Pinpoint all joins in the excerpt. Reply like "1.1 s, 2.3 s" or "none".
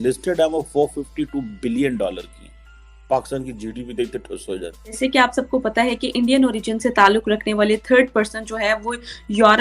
4.9 s